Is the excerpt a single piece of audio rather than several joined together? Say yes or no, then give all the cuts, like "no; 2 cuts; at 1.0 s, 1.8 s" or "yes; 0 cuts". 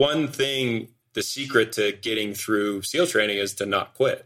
no; 1 cut; at 1.0 s